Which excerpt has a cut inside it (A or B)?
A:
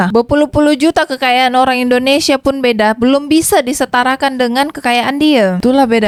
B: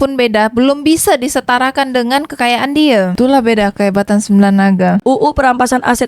B